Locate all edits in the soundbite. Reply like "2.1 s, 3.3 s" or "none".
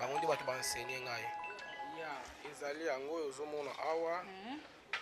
1.9 s